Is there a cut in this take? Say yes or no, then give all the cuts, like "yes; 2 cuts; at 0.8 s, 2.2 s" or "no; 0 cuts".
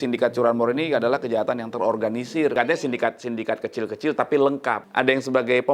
yes; 2 cuts; at 2.5 s, 4.8 s